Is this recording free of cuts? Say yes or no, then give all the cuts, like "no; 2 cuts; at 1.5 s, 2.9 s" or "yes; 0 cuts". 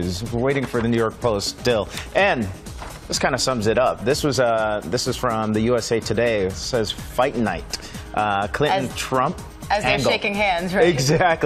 yes; 0 cuts